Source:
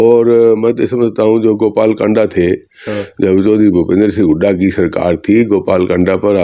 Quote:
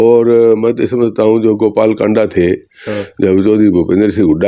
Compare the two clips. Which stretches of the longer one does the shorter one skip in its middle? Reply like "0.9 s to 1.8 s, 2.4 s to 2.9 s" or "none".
none